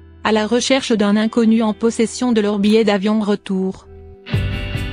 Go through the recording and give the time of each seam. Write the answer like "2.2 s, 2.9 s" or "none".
3.8 s

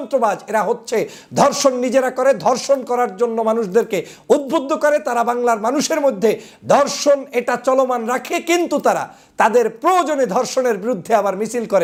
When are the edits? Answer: none

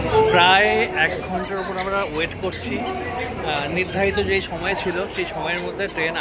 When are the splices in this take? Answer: none

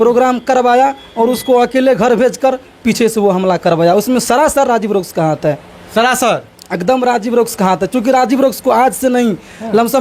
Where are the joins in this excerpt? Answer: none

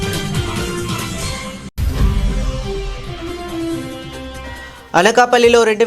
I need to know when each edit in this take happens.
1.8 s, 4.3 s

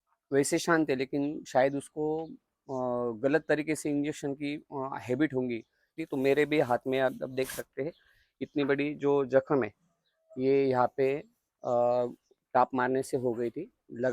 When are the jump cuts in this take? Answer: 6.0 s

